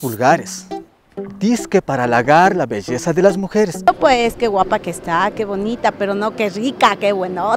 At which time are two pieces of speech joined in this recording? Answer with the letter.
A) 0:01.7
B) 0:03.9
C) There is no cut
B